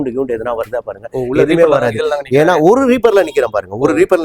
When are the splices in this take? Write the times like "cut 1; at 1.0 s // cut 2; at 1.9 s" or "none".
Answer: none